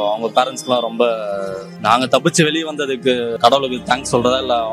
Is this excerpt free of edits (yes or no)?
no